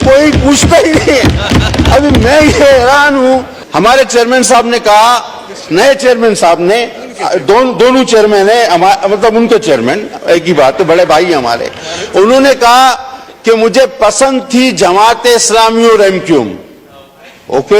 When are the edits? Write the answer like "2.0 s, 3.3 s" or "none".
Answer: 3.6 s